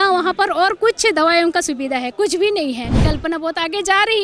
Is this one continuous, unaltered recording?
no; 1 cut; at 3.0 s

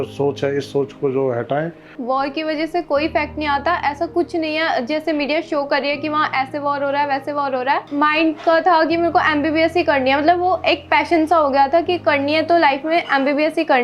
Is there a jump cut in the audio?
yes; 2 cuts; at 2.0 s, 7.9 s

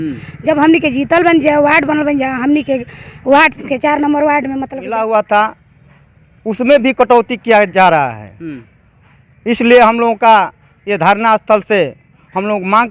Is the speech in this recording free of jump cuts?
no; 1 cut; at 4.9 s

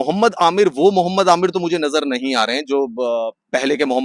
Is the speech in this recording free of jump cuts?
yes; 0 cuts

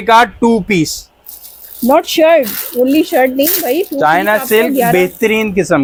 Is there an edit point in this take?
no; 0 cuts

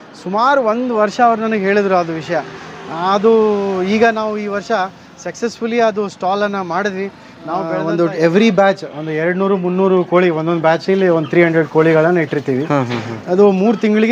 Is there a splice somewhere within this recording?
yes; 1 cut; at 7.3 s

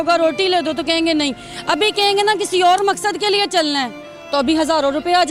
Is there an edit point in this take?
no; 0 cuts

